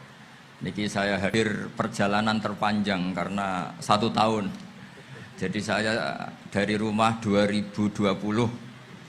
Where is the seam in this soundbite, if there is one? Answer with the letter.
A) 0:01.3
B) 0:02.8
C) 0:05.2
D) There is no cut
A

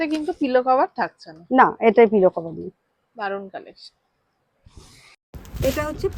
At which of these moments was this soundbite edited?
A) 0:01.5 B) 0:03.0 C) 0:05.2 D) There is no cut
D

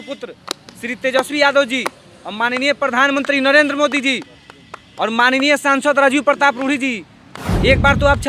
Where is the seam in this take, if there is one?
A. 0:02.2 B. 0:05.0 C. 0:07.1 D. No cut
D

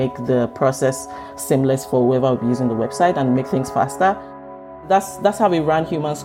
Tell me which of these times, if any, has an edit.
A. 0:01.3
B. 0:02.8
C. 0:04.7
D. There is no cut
C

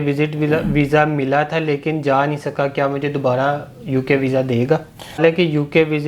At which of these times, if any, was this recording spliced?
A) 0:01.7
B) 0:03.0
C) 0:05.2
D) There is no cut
C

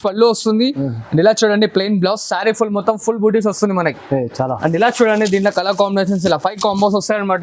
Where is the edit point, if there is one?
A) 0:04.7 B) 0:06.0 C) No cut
C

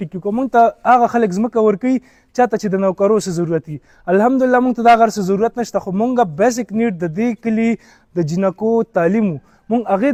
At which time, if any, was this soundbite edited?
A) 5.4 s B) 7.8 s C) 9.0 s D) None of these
D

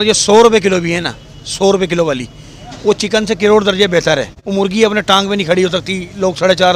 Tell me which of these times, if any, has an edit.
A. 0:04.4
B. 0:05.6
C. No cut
A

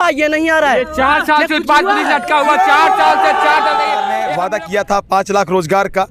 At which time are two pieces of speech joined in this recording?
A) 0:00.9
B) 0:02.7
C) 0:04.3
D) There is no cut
C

